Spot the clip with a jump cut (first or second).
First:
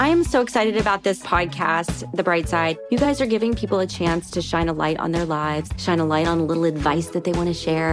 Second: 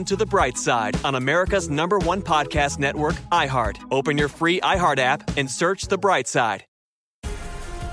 second